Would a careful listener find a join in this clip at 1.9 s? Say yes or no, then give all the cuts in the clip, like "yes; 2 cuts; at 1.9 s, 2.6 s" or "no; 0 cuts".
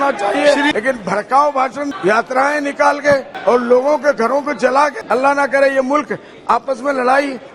yes; 4 cuts; at 0.7 s, 1.9 s, 3.3 s, 5.0 s